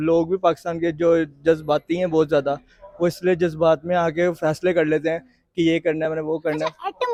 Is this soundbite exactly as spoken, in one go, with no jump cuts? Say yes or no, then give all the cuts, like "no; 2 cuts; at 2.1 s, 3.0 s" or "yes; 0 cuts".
yes; 0 cuts